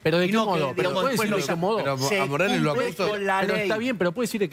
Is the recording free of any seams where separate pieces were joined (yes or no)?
yes